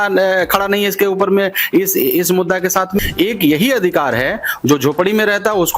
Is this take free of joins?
no; 1 cut; at 3.0 s

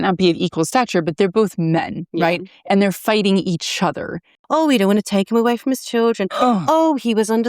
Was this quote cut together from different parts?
yes; 1 cut; at 4.3 s

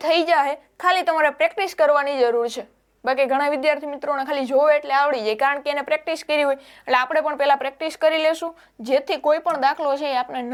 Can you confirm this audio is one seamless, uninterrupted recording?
yes; 0 cuts

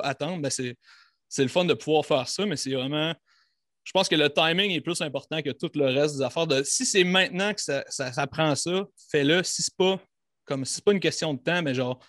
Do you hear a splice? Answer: no; 0 cuts

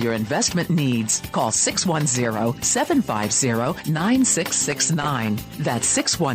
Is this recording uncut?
yes; 0 cuts

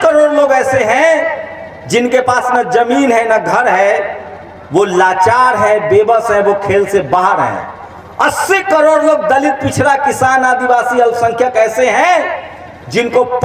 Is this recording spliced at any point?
no; 0 cuts

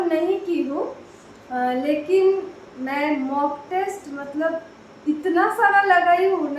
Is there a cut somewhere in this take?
no; 0 cuts

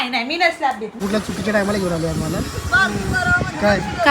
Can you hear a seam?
yes; 1 cut; at 1.0 s

